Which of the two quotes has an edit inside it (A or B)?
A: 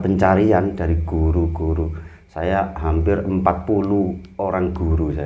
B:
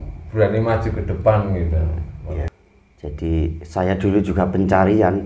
B